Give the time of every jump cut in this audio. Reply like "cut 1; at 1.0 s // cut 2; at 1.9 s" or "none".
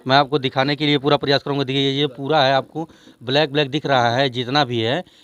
none